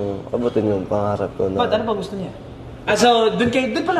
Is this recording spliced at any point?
yes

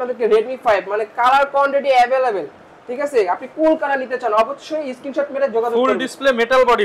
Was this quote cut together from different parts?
no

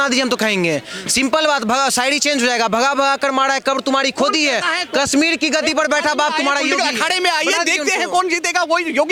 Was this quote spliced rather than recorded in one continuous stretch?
no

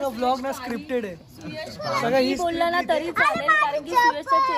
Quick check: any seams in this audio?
no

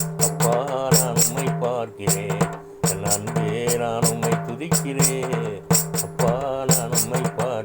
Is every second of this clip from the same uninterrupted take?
no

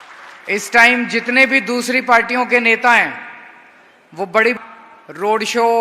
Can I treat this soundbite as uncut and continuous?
no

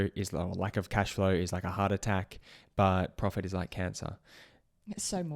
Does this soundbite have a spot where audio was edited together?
no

